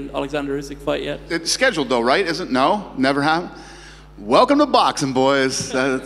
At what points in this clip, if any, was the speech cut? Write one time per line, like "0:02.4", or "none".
0:01.4